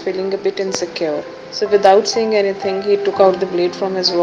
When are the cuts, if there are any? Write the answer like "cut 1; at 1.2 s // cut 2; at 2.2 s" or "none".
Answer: cut 1; at 1.4 s